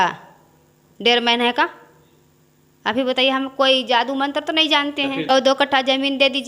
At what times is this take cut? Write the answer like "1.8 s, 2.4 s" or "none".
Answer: 5.3 s